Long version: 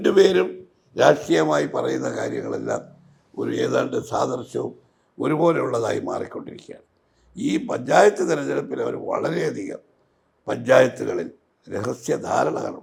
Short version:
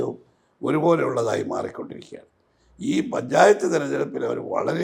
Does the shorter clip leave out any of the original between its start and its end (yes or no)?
no